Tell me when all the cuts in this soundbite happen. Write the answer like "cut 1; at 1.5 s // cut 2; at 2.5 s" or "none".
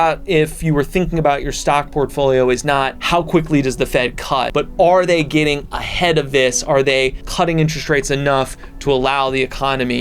cut 1; at 3.0 s // cut 2; at 4.5 s // cut 3; at 7.2 s